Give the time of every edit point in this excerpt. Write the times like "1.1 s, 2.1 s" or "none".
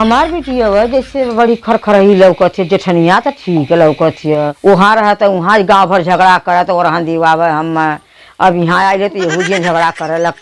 4.5 s